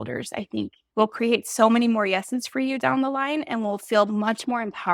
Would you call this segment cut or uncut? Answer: uncut